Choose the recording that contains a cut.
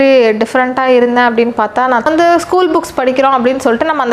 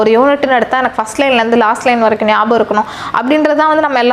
first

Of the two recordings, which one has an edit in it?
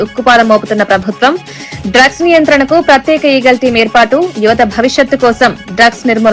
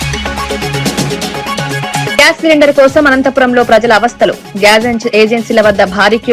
second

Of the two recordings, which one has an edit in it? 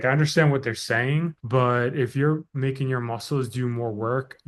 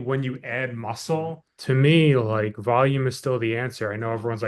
second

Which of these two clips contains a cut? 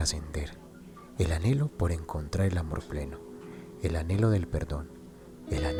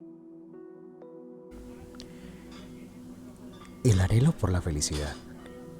second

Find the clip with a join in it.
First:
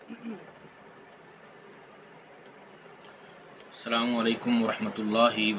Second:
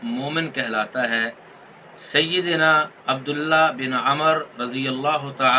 first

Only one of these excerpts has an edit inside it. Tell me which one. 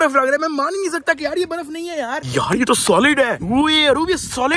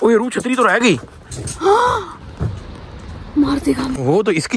first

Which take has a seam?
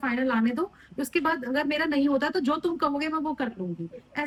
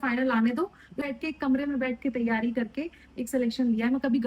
second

